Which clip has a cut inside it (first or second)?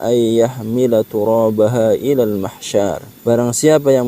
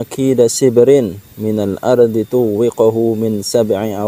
first